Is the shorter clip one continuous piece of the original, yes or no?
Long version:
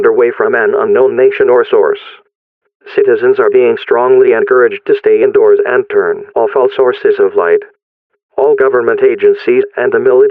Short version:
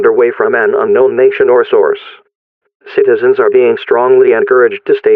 yes